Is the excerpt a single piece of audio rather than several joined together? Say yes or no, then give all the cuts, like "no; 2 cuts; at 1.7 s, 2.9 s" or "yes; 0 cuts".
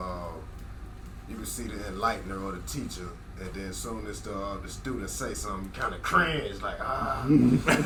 yes; 0 cuts